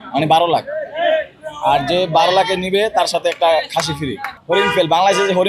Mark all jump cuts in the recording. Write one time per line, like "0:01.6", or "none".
0:04.3